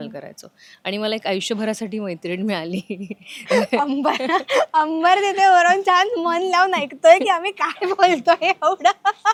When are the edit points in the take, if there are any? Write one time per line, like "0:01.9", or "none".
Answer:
none